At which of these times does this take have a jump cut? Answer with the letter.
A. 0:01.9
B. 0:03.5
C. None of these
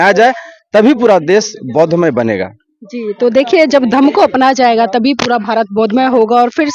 C